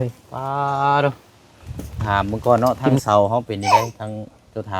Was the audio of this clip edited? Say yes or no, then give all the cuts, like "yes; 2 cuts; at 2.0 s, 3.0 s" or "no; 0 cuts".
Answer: yes; 1 cut; at 2.0 s